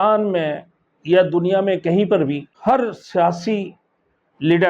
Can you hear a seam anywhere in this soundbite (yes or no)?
yes